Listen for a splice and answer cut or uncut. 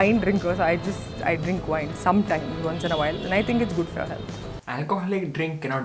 cut